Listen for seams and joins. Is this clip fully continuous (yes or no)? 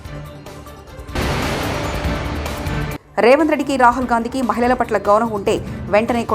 yes